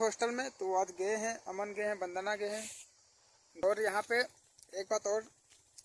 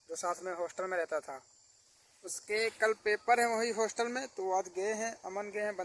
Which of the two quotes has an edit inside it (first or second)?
first